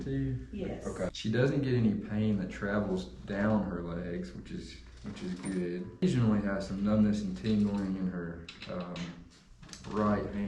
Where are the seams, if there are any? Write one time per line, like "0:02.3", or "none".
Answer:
0:01.1
0:06.0